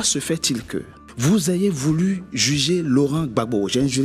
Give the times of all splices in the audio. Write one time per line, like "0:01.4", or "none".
0:01.3